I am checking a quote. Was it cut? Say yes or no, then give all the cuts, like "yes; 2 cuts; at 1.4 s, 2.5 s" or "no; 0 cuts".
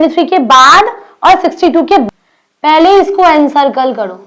yes; 1 cut; at 2.1 s